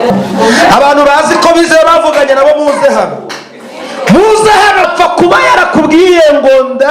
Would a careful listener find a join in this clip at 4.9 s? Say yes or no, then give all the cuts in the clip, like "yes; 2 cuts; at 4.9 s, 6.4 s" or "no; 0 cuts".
yes; 1 cut; at 4.9 s